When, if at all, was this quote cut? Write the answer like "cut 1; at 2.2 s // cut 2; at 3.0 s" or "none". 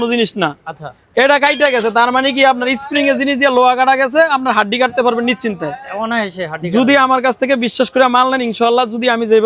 none